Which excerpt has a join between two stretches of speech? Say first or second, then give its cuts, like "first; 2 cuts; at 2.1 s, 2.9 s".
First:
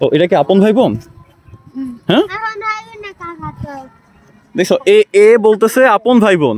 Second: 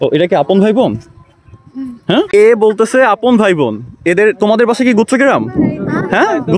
second; 1 cut; at 2.3 s